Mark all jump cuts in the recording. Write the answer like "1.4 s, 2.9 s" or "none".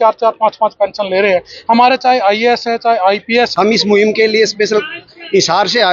3.5 s

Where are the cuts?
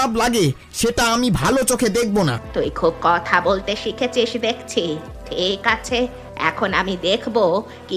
2.4 s

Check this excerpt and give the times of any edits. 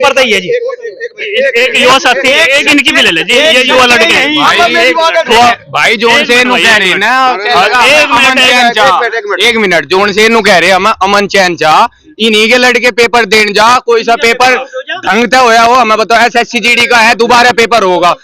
5.3 s

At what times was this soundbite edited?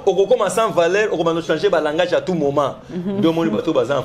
none

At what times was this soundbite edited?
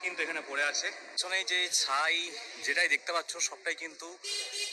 1.1 s

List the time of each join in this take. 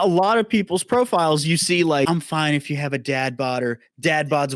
2.1 s

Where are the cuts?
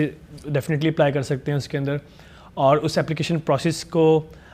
none

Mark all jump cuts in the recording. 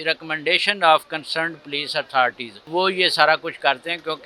2.5 s

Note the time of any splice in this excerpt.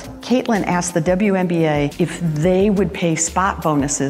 none

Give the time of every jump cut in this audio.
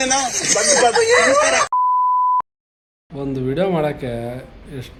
none

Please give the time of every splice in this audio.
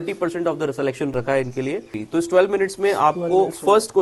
1.4 s

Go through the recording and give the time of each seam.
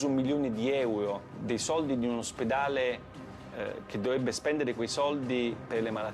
1.3 s

